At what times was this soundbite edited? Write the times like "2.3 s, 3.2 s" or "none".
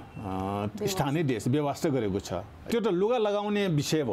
2.7 s